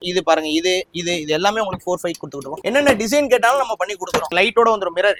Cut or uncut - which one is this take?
uncut